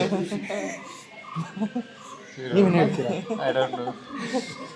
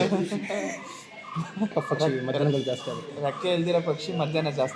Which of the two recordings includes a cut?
second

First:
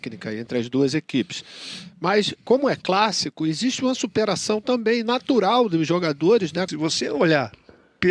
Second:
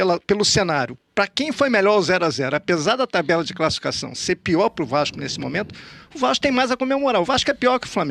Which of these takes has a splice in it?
first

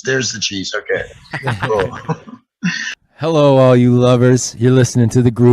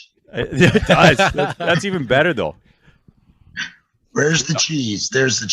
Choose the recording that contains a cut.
first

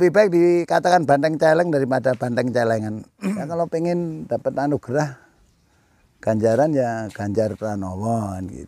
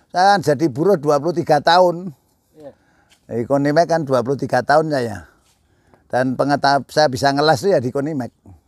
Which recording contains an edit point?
first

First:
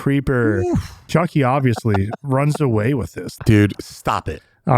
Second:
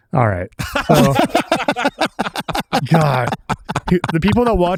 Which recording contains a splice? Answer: first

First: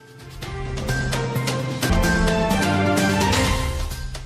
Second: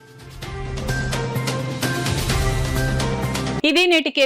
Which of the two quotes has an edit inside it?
first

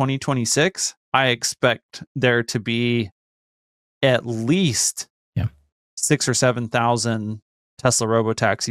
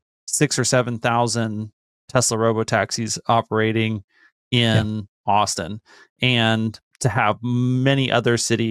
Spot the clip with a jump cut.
first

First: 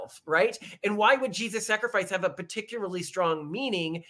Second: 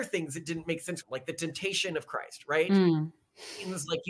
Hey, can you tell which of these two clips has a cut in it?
second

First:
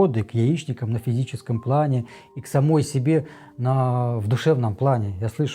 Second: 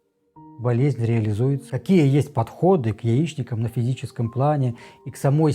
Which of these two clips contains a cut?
second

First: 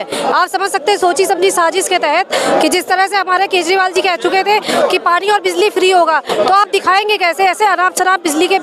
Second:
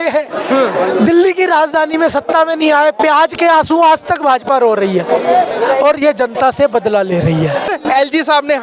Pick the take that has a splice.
second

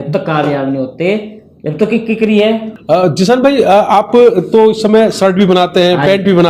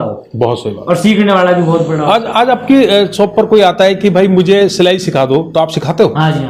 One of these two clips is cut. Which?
first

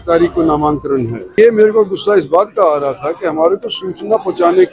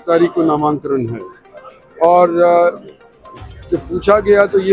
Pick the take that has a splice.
first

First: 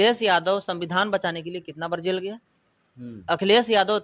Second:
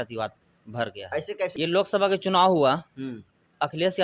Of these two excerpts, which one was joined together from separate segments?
second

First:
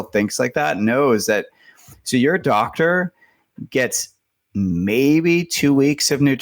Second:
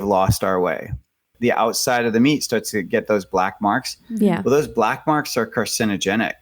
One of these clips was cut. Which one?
second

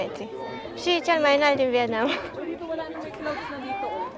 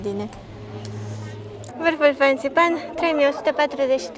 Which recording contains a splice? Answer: second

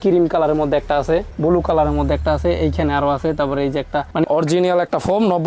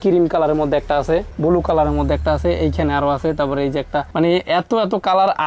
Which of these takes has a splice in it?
first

